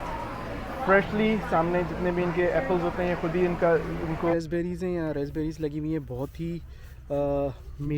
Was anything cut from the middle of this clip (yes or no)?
yes